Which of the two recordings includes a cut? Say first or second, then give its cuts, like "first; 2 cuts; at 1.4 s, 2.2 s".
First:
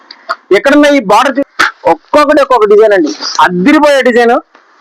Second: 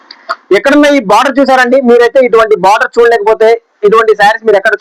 first; 1 cut; at 1.4 s